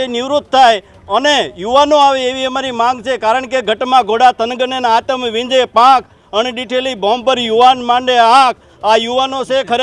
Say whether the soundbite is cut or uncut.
uncut